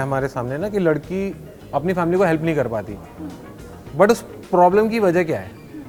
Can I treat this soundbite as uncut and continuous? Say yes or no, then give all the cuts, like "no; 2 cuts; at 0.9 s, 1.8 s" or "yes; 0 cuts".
yes; 0 cuts